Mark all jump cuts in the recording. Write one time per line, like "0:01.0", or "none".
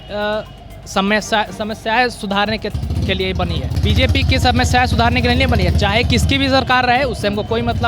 0:03.7